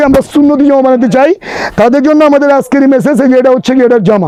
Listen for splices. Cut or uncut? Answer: uncut